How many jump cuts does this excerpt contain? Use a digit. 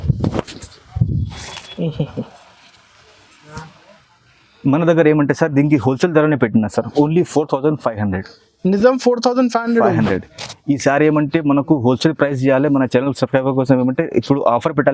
0